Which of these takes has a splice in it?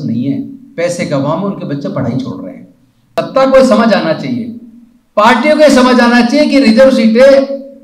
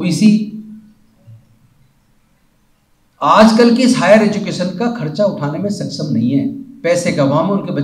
first; 1 cut; at 3.2 s

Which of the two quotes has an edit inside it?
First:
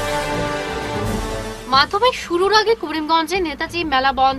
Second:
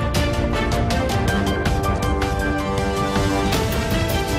first; 1 cut; at 1.0 s

